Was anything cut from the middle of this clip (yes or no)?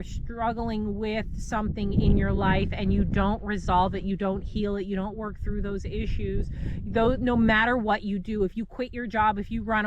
no